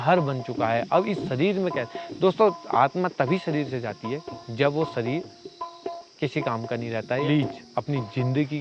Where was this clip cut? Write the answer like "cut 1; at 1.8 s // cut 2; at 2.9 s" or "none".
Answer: cut 1; at 7.2 s

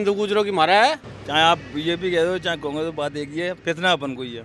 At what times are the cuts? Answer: cut 1; at 1.1 s

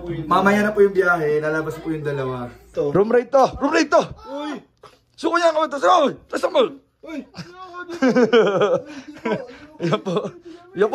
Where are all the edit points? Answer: cut 1; at 2.6 s

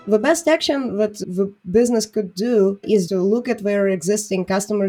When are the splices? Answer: cut 1; at 1.2 s // cut 2; at 2.9 s

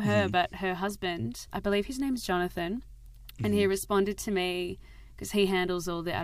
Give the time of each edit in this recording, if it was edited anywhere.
none

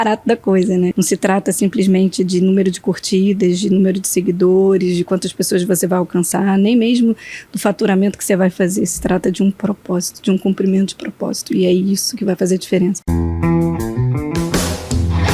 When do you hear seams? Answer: cut 1; at 0.9 s // cut 2; at 13.1 s

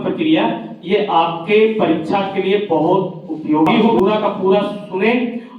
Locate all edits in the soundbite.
cut 1; at 4.0 s

